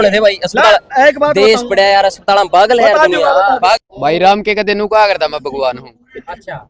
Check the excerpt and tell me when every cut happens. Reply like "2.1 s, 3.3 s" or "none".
3.8 s